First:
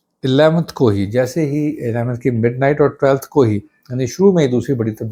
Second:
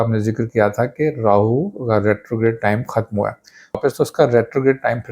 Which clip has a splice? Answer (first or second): second